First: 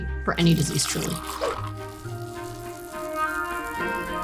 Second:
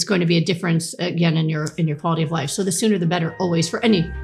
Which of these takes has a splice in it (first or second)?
first